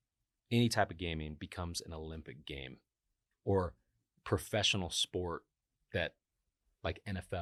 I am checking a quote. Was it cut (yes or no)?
no